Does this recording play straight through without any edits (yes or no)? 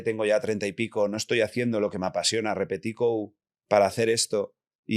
no